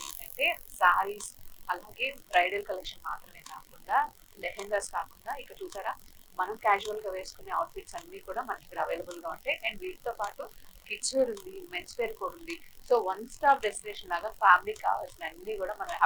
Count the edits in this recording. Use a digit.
0